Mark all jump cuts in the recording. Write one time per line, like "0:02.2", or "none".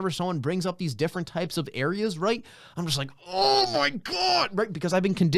none